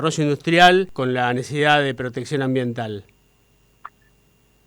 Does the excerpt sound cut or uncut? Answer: cut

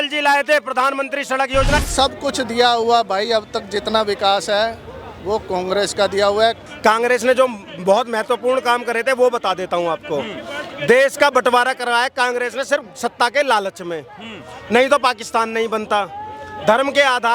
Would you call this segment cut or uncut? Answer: cut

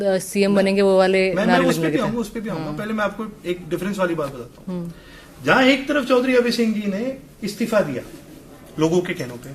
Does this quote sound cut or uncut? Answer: uncut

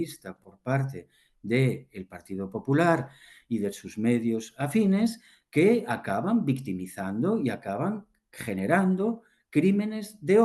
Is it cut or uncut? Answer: uncut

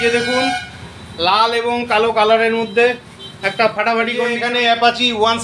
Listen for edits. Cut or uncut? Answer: cut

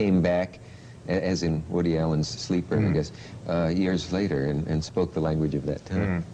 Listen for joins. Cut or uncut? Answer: cut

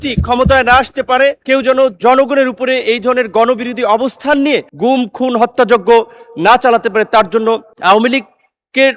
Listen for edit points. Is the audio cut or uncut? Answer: cut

